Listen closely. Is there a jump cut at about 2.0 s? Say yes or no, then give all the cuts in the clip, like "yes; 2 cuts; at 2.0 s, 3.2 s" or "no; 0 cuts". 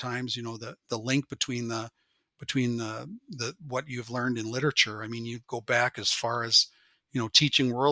no; 0 cuts